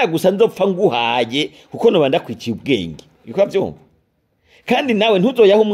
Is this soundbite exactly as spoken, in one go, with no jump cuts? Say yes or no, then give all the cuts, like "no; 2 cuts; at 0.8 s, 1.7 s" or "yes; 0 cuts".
yes; 0 cuts